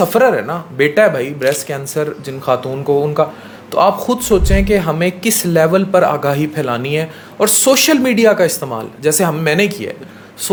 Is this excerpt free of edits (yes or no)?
yes